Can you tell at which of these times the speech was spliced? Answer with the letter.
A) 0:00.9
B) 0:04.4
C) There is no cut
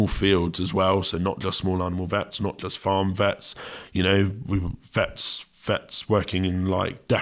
C